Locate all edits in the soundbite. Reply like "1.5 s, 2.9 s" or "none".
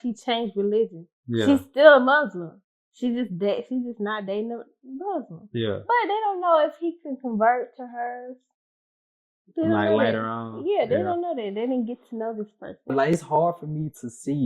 12.9 s